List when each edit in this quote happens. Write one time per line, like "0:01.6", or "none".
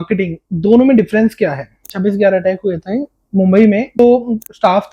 0:01.8
0:04.0